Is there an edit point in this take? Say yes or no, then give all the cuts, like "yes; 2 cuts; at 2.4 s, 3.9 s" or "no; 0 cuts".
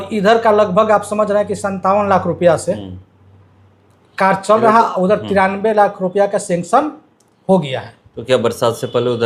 no; 0 cuts